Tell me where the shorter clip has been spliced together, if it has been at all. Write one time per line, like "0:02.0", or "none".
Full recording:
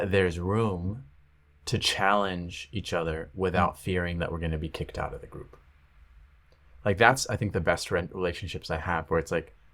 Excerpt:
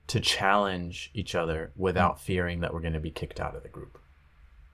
none